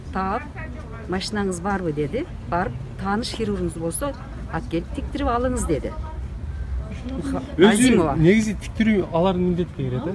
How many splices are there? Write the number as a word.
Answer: zero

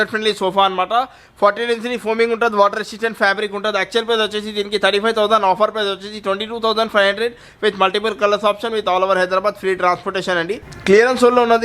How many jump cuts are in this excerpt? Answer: one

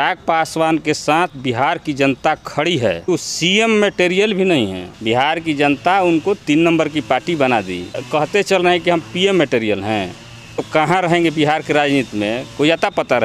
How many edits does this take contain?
four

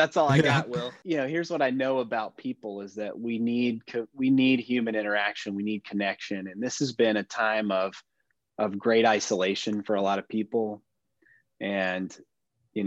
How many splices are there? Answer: one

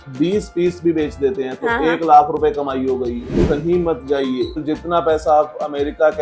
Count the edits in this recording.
one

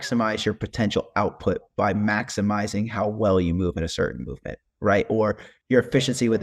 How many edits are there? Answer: one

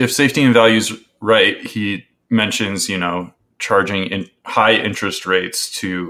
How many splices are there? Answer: zero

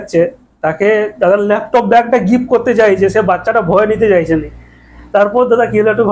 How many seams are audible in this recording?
zero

